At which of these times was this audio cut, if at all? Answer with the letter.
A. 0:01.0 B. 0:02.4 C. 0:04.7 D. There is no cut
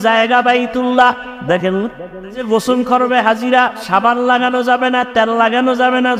B